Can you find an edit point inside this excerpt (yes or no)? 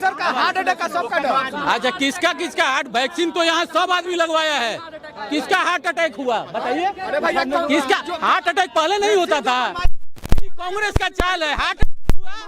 no